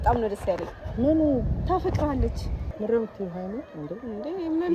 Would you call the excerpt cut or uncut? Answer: uncut